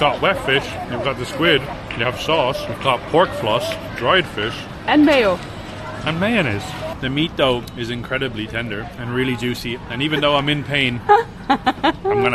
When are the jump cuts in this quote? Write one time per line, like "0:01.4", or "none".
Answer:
0:01.7
0:02.7
0:03.9
0:07.0
0:07.7
0:08.9